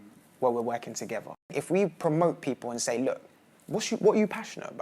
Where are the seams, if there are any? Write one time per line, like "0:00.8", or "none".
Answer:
0:01.5